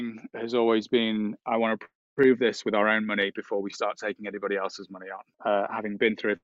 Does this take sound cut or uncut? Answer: cut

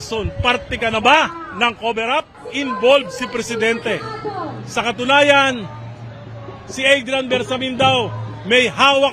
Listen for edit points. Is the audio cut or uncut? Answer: cut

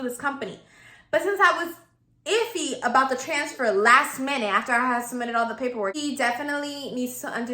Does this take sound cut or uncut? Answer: cut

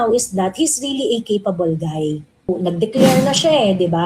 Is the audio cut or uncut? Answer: cut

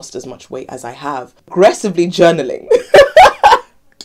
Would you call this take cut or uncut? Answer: cut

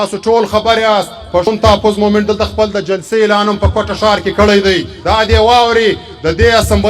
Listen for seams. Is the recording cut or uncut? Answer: cut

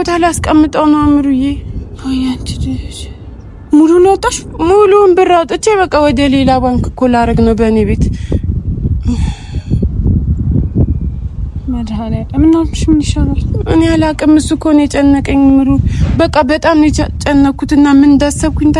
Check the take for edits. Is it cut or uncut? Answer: uncut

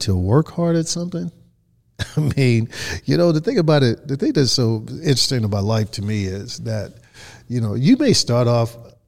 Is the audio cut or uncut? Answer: uncut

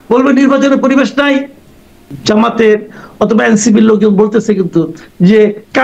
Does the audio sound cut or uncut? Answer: cut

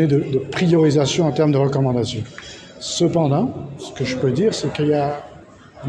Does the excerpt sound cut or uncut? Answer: uncut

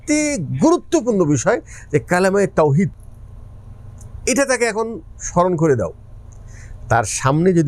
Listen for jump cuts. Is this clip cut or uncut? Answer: uncut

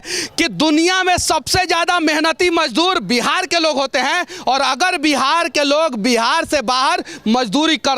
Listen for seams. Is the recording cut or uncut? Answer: uncut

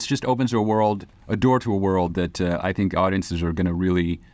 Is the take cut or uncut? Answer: uncut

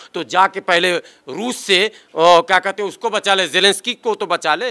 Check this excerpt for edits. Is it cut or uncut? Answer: uncut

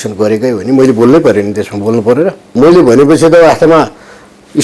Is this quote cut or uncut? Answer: cut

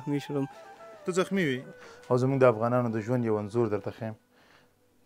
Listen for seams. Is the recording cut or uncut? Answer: cut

